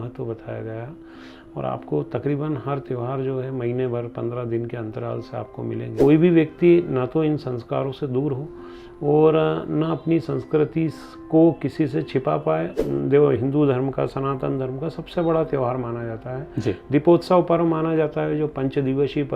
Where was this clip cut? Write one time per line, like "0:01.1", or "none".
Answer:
0:05.9
0:12.7